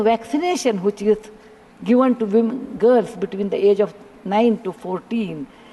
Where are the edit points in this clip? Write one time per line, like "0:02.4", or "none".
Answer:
none